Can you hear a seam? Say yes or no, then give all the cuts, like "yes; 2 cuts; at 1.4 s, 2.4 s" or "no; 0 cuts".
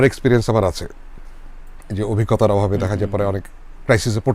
no; 0 cuts